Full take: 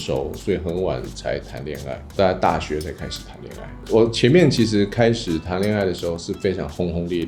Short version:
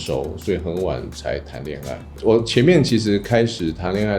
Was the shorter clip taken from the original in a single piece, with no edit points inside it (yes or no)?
no